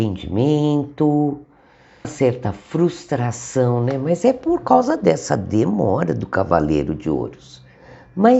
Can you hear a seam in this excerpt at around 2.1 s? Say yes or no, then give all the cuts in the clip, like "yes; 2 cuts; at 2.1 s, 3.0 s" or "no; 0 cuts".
yes; 1 cut; at 2.1 s